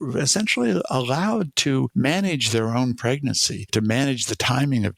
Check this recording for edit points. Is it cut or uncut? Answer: cut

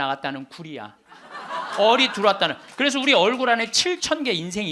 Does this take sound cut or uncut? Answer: uncut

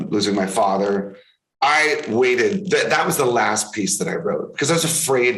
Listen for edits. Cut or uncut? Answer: uncut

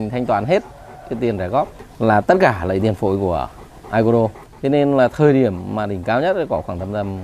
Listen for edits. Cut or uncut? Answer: cut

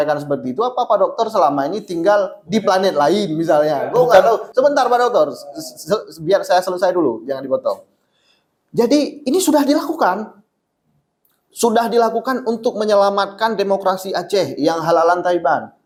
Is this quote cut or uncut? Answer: uncut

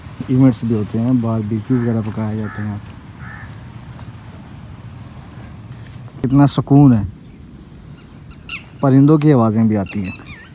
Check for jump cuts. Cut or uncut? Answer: cut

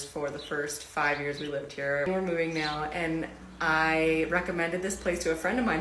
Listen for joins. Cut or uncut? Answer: cut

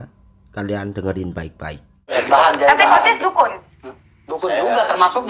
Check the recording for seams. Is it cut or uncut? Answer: cut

